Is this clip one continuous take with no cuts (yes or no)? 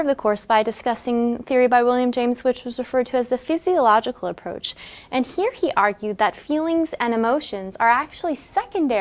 yes